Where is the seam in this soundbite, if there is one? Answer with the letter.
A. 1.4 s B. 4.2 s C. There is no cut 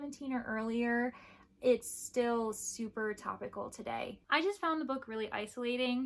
B